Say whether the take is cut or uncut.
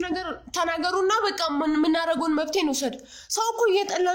uncut